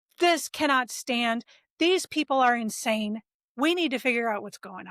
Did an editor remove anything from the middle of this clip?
no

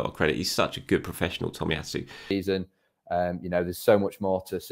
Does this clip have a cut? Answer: yes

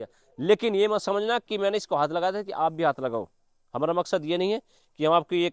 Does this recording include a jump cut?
no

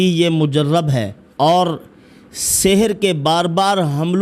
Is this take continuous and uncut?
no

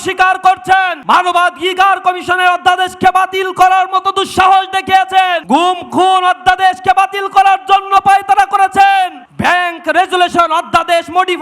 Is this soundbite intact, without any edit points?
no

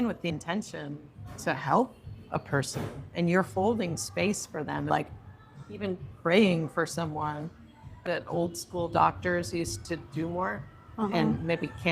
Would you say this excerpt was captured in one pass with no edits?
no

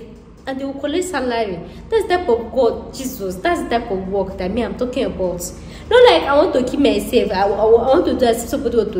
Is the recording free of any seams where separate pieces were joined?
yes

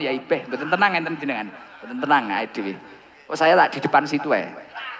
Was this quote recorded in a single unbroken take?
yes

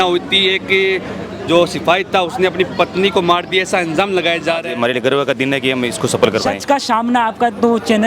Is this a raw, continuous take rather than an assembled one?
no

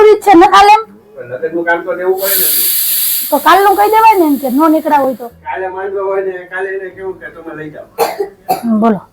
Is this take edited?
no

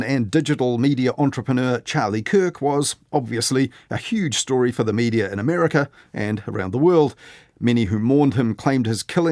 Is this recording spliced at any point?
no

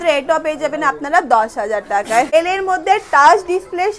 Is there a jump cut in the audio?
yes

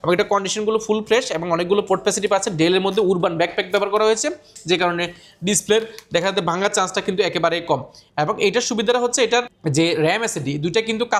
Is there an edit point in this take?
no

